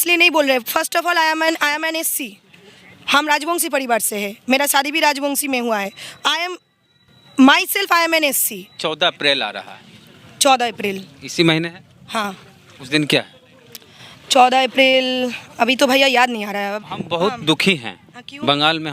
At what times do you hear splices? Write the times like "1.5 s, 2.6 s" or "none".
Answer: 8.8 s, 16.9 s